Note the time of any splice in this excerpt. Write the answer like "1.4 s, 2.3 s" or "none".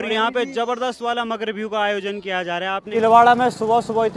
2.9 s